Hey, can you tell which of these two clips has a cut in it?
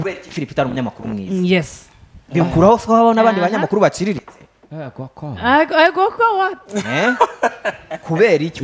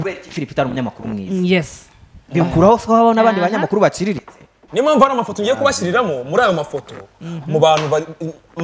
second; 1 cut; at 4.6 s

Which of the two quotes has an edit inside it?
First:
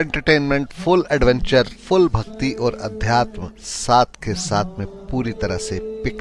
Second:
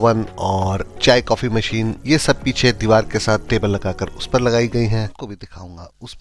second; 1 cut; at 5.2 s

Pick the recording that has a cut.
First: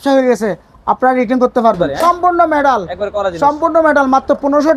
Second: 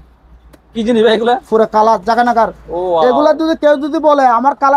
first; 1 cut; at 1.9 s

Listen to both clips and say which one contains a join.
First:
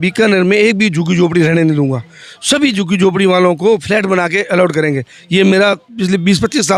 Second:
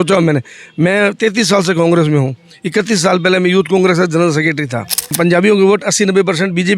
second; 1 cut; at 5.1 s

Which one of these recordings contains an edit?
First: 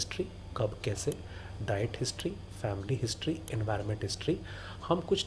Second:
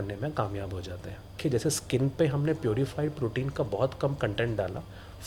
second; 1 cut; at 1.4 s

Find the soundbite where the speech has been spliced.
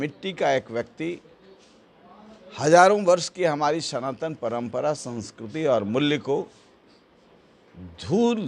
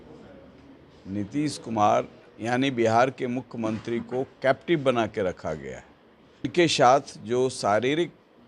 second; 1 cut; at 6.4 s

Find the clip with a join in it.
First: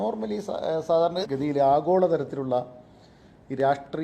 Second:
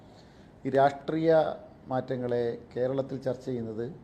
first; 1 cut; at 1.2 s

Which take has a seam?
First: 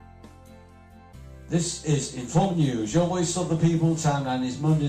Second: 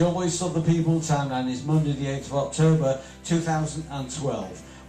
first; 1 cut; at 1.1 s

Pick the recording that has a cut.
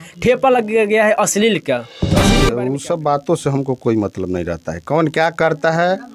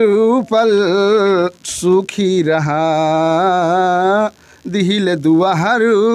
first; 1 cut; at 2.4 s

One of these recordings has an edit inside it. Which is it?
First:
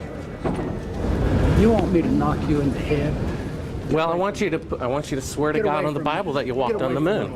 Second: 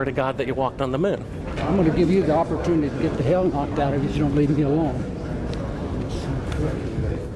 first; 1 cut; at 1.0 s

